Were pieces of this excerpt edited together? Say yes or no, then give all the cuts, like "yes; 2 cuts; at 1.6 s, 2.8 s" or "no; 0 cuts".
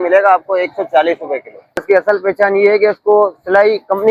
yes; 1 cut; at 1.8 s